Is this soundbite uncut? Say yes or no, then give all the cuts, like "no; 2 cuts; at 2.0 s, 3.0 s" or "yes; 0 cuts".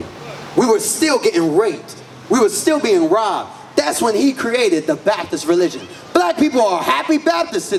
yes; 0 cuts